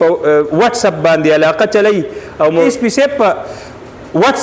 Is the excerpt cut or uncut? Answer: cut